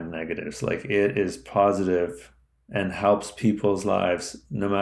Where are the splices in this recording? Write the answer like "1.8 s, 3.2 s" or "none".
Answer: none

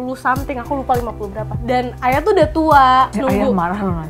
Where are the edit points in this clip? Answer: 1.5 s, 3.1 s

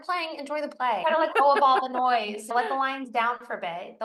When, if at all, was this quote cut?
1.0 s, 2.5 s

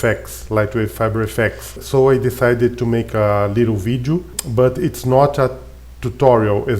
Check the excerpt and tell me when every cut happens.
1.8 s, 4.4 s

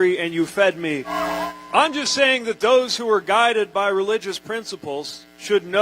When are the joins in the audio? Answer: 1.1 s

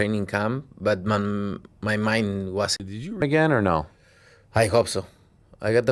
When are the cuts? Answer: 3.2 s

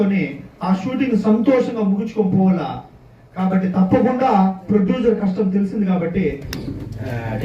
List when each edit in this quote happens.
6.5 s

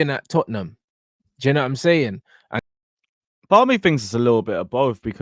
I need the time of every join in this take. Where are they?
2.4 s

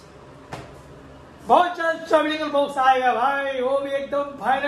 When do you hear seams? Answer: none

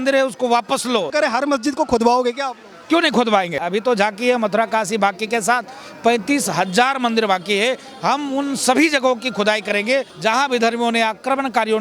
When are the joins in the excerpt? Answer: 1.1 s, 3.6 s, 10.1 s

